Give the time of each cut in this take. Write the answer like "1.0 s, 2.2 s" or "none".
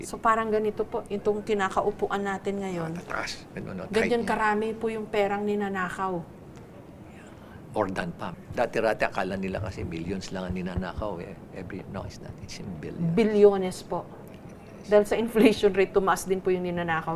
8.3 s

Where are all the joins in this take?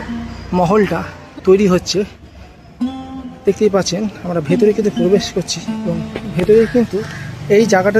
none

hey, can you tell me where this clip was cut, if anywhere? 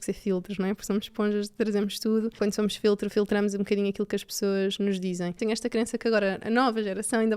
2.3 s, 5.4 s

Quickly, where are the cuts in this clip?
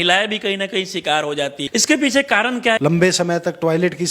1.6 s, 2.8 s

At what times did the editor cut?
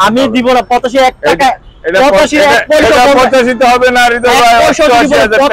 none

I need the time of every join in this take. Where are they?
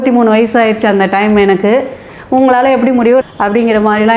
none

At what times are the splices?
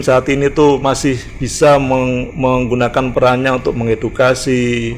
3.1 s

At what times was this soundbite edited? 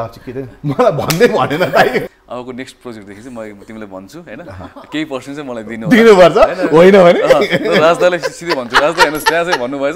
2.1 s

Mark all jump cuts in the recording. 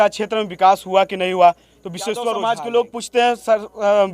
2.4 s

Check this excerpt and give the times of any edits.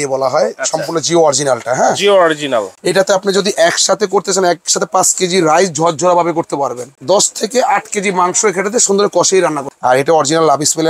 2.8 s, 6.9 s, 9.7 s

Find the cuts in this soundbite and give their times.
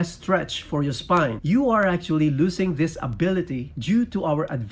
none

